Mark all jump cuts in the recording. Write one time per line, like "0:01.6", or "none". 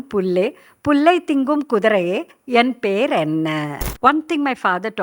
0:03.8